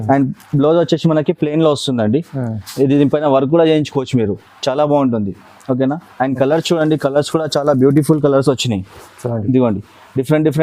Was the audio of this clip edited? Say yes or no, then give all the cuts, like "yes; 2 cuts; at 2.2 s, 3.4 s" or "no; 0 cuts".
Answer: no; 0 cuts